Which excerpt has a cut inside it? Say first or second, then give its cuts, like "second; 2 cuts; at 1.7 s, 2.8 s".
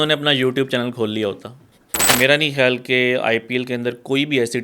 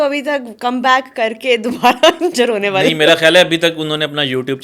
first; 1 cut; at 2.1 s